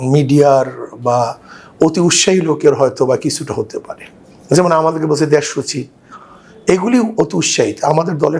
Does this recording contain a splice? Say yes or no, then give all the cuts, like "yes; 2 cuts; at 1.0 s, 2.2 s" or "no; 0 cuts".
no; 0 cuts